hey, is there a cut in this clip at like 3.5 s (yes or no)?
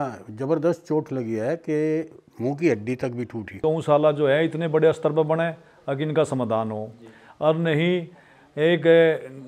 yes